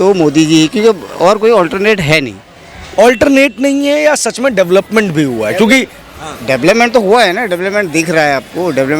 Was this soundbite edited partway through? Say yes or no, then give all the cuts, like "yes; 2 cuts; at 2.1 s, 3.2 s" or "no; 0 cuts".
no; 0 cuts